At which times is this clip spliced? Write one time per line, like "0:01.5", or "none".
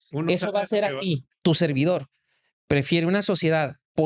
0:01.3